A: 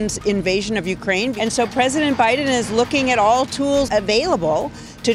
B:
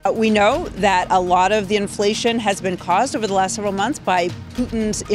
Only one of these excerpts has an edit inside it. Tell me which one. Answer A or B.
A